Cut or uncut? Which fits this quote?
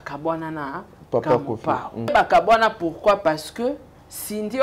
cut